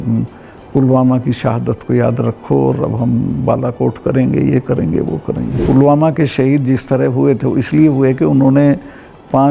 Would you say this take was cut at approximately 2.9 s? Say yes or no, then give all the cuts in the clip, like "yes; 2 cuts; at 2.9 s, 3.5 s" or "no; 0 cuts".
no; 1 cut; at 5.5 s